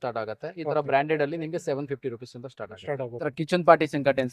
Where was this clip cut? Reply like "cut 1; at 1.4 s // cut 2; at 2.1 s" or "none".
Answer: cut 1; at 3.2 s

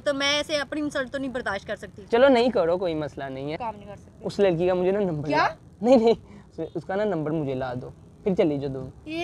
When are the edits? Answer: cut 1; at 3.5 s

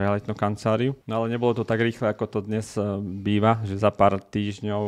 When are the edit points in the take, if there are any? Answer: cut 1; at 1.0 s

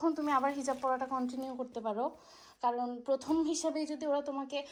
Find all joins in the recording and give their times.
none

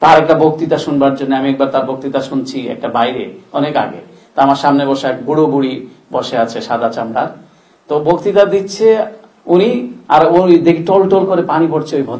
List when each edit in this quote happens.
none

